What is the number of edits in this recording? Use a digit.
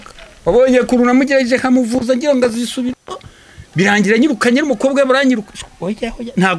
0